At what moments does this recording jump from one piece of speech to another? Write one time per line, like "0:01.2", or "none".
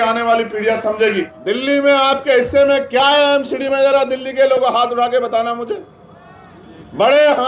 0:01.2